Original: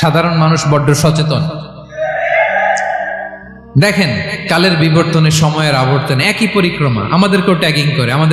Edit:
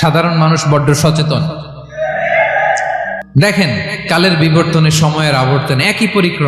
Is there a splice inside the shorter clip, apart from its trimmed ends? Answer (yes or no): yes